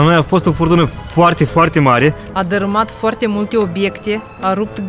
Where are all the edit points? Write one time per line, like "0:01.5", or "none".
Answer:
0:02.2